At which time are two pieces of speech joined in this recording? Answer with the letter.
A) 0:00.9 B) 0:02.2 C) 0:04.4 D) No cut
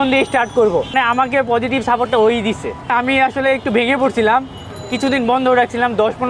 A